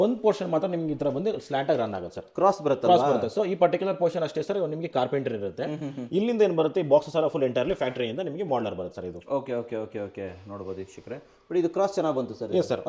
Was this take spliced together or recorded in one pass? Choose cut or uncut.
uncut